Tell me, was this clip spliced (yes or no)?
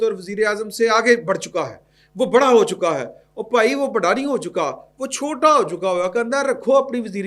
no